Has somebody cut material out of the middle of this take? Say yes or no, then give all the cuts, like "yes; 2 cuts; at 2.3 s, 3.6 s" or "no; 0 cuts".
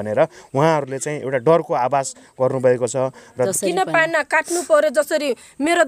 yes; 1 cut; at 3.5 s